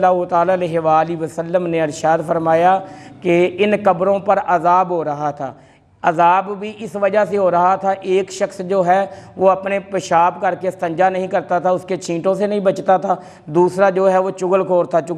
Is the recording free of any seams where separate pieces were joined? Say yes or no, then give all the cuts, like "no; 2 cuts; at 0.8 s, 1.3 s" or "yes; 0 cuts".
yes; 0 cuts